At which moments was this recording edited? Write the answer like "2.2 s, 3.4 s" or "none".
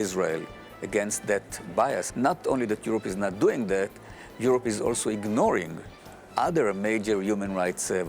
2.1 s